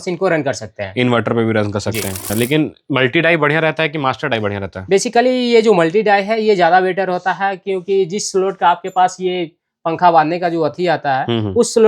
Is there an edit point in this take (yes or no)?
yes